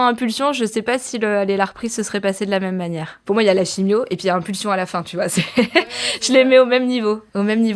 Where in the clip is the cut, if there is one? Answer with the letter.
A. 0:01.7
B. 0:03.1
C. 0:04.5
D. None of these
B